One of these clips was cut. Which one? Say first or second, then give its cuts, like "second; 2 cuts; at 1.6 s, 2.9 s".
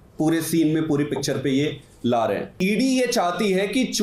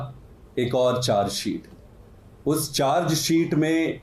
first; 1 cut; at 2.6 s